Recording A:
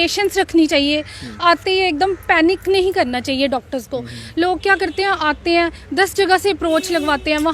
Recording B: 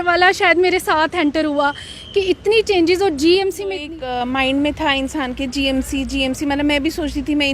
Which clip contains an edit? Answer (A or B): B